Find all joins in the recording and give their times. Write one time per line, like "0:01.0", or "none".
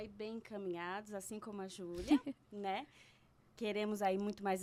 none